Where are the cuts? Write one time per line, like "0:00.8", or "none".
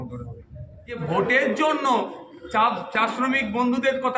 0:01.0